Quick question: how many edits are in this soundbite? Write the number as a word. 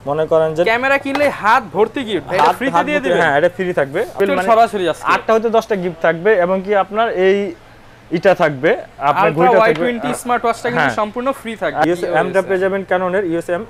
two